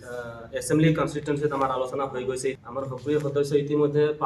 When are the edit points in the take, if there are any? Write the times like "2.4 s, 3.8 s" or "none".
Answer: 2.6 s